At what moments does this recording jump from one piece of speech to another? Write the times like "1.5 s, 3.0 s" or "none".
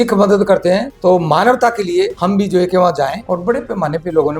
0.9 s, 2.2 s, 3.2 s